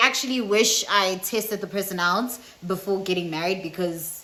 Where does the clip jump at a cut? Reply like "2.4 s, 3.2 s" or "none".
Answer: none